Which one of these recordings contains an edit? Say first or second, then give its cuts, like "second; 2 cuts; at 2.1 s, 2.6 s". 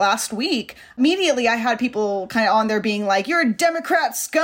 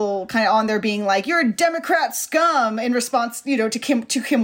first; 1 cut; at 1.0 s